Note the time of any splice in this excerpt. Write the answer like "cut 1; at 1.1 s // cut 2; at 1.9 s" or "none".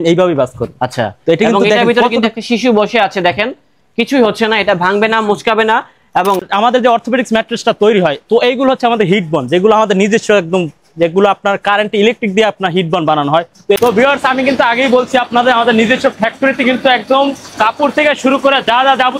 cut 1; at 6.4 s // cut 2; at 13.8 s